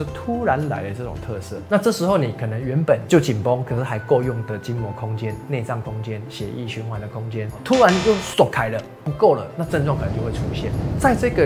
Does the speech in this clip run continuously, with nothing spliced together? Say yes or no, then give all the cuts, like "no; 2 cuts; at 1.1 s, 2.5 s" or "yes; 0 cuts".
no; 1 cut; at 1.5 s